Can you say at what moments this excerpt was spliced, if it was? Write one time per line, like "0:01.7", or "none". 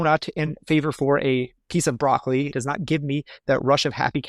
0:02.6